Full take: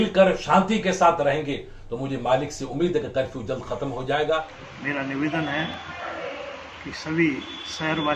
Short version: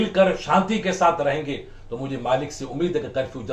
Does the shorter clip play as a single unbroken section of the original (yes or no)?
yes